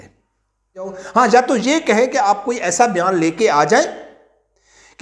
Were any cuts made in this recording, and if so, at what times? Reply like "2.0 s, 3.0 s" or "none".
1.0 s